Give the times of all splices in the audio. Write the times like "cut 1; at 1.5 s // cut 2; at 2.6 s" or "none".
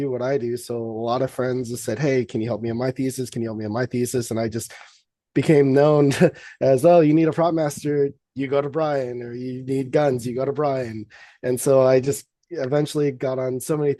none

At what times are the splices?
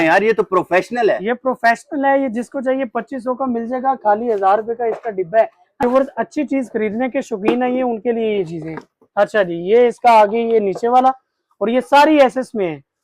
cut 1; at 5.8 s

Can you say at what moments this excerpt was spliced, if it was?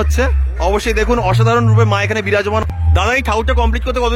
cut 1; at 2.6 s

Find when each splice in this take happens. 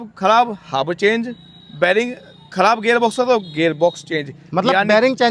none

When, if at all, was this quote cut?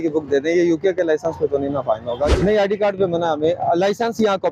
cut 1; at 2.3 s

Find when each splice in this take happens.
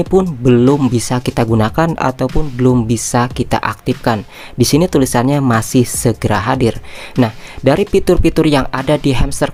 none

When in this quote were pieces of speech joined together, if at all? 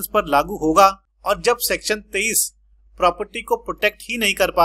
cut 1; at 1.1 s

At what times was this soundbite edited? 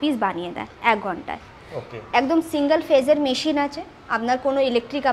none

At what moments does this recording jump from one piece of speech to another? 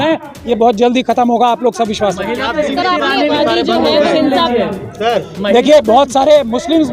cut 1; at 3.3 s

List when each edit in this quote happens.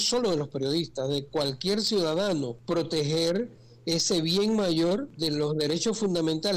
cut 1; at 2.6 s // cut 2; at 5.1 s

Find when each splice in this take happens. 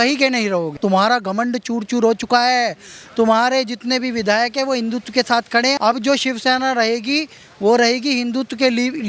cut 1; at 0.8 s // cut 2; at 5.8 s

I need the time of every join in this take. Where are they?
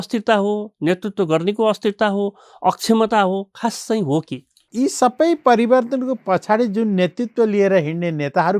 cut 1; at 4.6 s

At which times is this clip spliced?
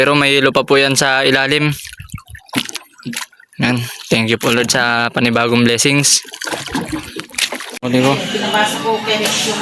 cut 1; at 7.8 s

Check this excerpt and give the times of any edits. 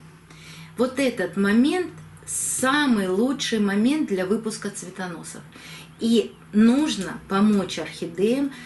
none

